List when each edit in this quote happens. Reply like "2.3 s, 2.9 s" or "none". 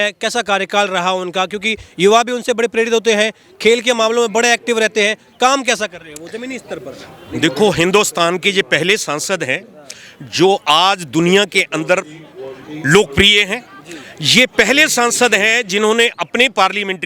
none